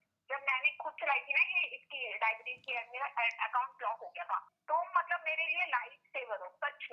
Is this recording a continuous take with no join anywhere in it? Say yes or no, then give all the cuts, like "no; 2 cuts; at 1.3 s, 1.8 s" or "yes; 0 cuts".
no; 1 cut; at 4.5 s